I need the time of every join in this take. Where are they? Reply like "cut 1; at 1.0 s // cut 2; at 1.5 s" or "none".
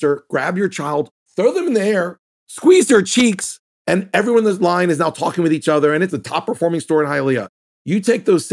cut 1; at 3.7 s // cut 2; at 6.1 s